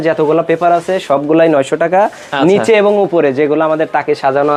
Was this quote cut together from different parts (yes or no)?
no